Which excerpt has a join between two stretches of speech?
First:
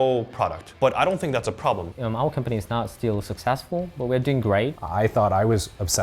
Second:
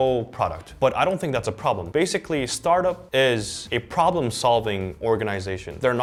first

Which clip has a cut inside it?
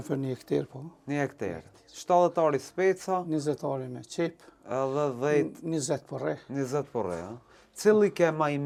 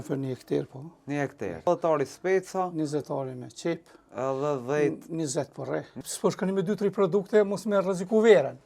second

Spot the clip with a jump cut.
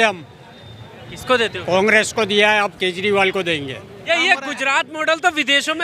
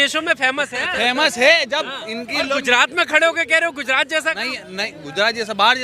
first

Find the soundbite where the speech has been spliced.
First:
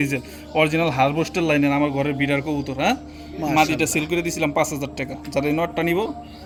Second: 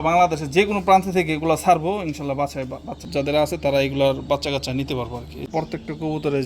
second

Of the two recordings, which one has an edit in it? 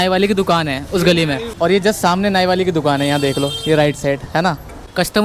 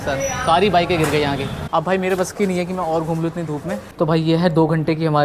second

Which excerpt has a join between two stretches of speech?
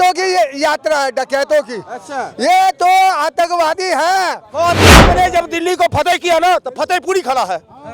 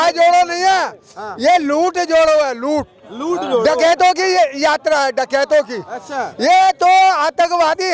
first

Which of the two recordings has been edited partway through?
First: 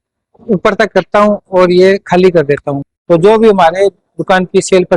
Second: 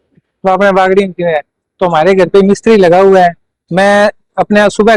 first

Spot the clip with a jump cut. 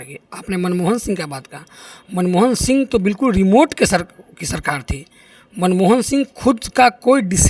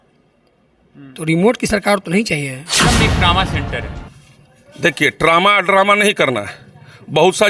second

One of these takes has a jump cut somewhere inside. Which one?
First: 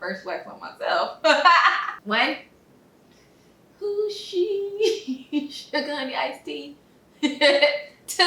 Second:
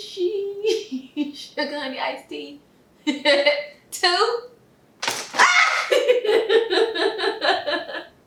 first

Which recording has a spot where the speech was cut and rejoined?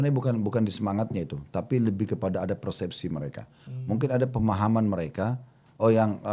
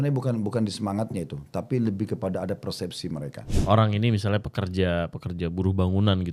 second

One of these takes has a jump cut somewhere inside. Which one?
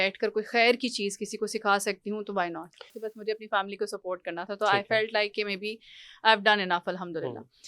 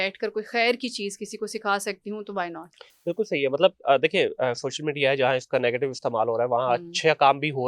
first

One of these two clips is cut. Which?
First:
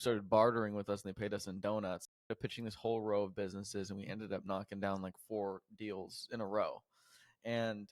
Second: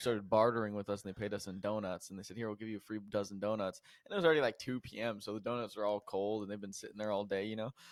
first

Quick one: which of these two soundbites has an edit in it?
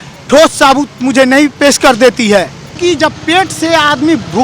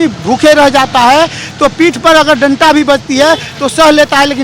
first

